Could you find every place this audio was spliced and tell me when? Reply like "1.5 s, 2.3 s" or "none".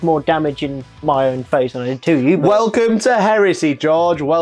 none